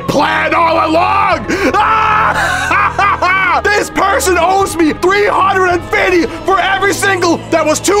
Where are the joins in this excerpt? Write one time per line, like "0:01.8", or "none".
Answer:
0:03.6